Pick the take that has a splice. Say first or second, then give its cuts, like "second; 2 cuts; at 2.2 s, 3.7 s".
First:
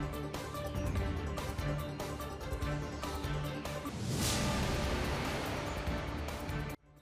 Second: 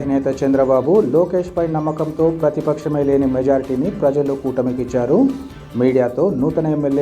first; 2 cuts; at 2.9 s, 3.5 s